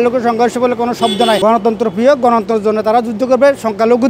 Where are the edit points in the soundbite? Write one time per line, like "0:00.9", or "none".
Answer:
0:01.4